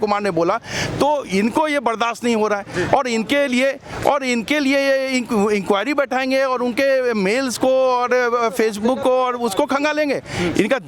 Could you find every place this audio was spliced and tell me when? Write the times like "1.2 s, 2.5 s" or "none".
none